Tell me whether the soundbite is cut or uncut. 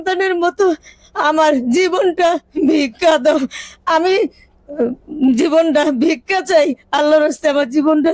uncut